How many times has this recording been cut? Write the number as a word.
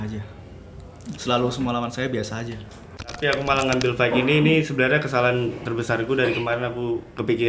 one